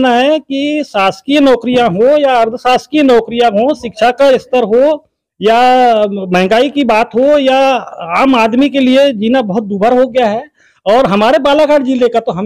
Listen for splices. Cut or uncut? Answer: uncut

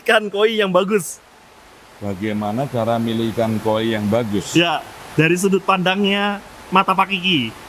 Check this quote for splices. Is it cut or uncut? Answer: uncut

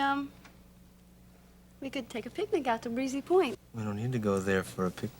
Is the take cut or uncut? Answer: cut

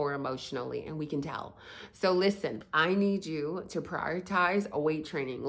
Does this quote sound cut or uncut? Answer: uncut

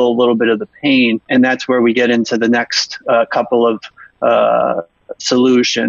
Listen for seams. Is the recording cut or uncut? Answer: cut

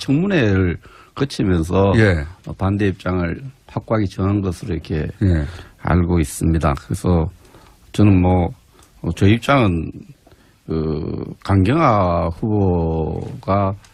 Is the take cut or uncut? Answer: uncut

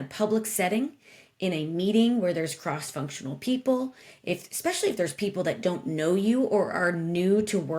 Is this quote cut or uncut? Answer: uncut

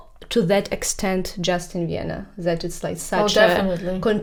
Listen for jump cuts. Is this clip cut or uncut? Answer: uncut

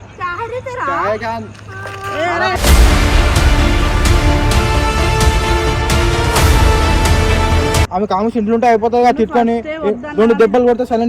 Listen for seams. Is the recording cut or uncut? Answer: cut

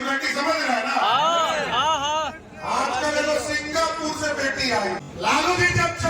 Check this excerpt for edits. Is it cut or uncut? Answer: cut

